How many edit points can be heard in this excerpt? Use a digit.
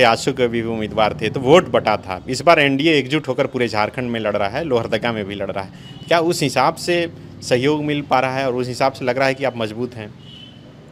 0